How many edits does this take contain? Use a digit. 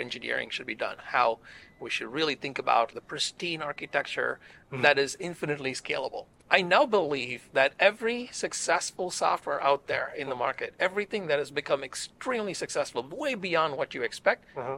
2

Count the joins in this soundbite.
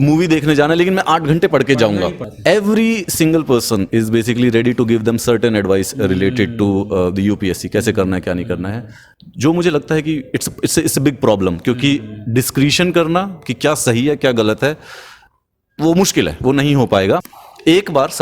2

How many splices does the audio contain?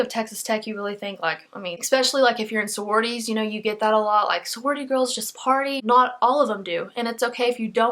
1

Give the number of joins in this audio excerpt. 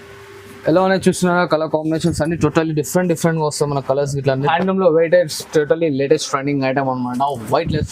1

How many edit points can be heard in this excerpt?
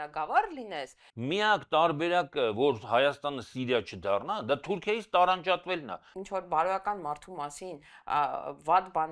2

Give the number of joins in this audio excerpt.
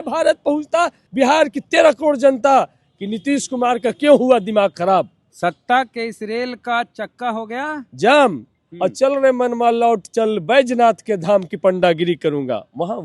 2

